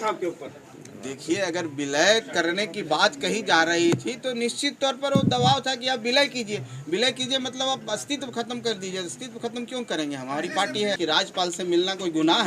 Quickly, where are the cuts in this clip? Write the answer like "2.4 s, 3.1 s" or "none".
11.0 s